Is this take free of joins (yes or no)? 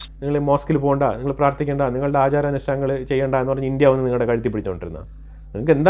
yes